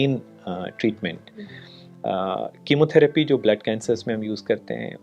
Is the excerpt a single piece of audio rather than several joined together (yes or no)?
yes